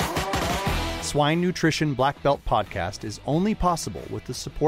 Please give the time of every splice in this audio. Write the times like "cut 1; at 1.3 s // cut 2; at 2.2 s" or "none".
cut 1; at 0.9 s